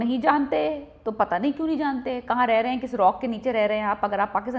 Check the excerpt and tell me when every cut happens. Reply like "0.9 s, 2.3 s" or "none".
none